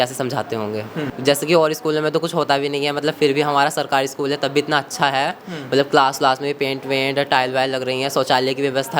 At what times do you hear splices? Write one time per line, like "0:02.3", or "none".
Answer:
0:01.0